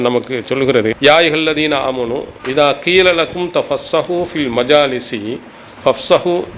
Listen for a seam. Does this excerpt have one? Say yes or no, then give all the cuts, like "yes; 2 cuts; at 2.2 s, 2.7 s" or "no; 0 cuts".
yes; 2 cuts; at 1.0 s, 2.3 s